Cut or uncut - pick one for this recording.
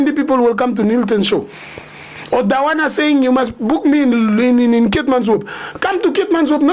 uncut